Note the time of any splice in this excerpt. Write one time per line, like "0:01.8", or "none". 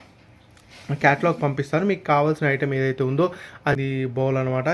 0:03.8